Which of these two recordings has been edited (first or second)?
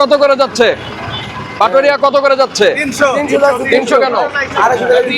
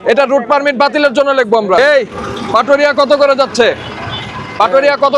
second